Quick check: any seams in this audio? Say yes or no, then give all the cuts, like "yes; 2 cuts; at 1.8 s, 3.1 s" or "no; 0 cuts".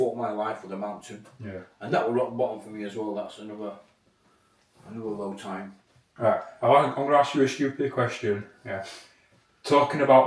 no; 0 cuts